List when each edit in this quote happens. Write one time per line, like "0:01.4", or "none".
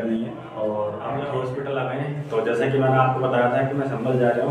0:01.2